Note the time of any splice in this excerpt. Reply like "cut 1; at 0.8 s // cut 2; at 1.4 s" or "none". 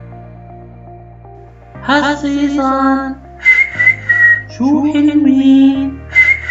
cut 1; at 1.8 s